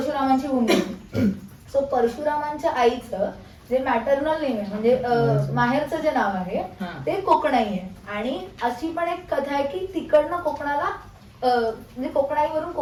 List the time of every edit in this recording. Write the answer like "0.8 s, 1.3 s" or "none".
none